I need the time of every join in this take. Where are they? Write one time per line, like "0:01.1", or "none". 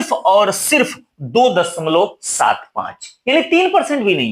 none

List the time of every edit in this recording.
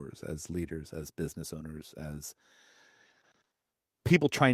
none

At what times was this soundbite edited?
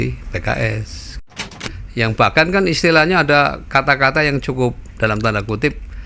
0:01.6

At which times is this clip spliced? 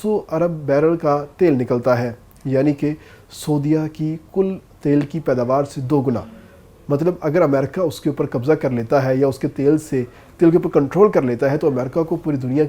none

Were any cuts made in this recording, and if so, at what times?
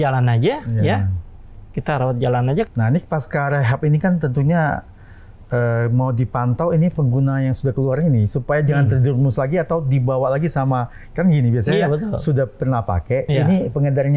0:02.7

